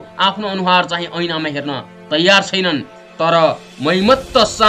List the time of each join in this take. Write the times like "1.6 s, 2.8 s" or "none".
3.0 s